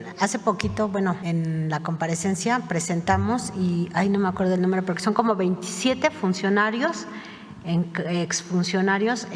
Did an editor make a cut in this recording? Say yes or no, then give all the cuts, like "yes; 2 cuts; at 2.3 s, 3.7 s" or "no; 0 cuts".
yes; 1 cut; at 1.2 s